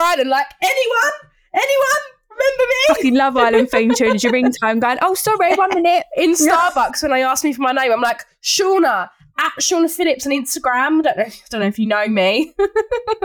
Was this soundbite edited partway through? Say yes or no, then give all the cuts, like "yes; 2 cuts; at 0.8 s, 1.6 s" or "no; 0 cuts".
no; 0 cuts